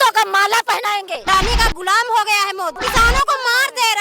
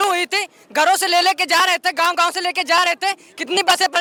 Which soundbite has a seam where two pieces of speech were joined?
first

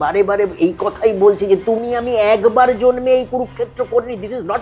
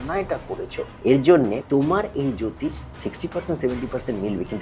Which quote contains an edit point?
second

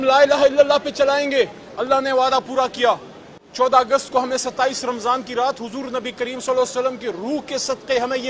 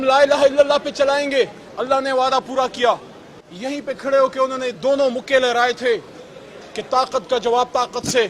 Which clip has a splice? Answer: second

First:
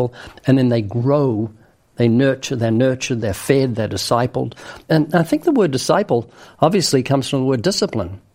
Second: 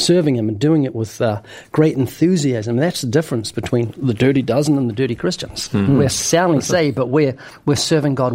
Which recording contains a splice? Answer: first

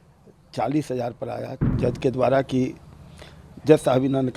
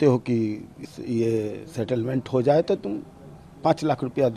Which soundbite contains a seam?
first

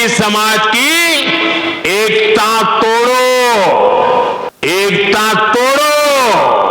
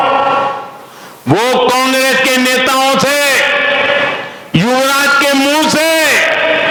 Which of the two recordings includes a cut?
first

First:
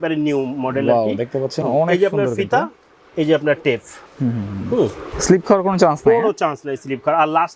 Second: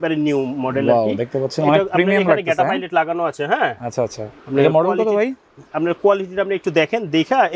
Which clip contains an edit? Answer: first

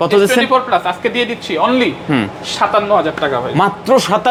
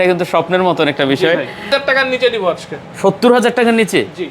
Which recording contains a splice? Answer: second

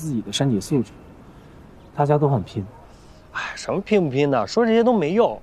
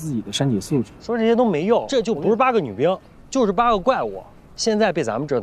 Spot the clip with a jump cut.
second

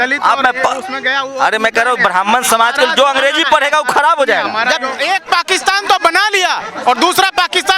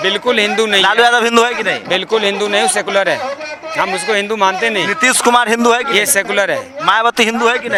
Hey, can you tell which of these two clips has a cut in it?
first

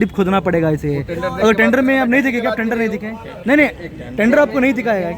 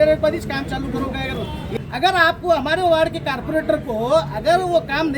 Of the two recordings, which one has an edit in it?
second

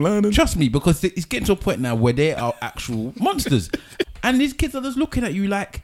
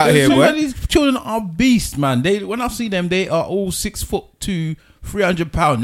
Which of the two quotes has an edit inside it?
first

